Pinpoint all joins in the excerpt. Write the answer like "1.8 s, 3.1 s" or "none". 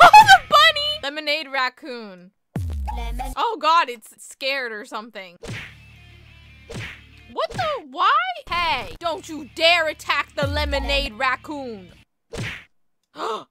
1.0 s